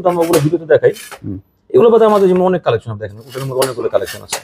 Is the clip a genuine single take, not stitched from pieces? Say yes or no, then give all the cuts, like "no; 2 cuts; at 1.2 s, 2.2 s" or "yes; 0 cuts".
yes; 0 cuts